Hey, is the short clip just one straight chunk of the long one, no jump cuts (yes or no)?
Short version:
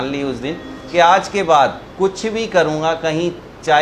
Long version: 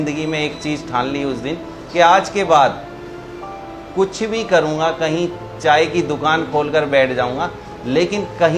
no